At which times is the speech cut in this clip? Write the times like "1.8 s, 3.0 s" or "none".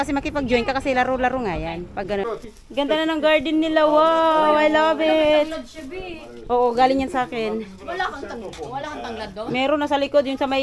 2.1 s